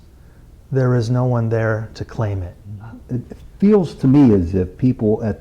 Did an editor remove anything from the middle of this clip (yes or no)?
yes